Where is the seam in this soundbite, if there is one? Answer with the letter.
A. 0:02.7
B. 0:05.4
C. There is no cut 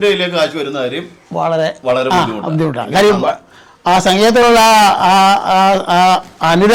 C